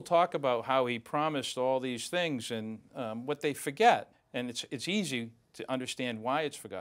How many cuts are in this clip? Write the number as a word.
one